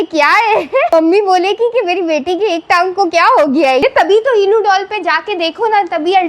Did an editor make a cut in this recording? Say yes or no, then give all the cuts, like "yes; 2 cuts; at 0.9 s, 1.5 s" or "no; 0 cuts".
yes; 2 cuts; at 0.9 s, 3.8 s